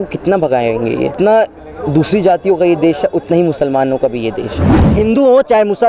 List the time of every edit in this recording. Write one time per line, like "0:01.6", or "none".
0:01.1
0:04.8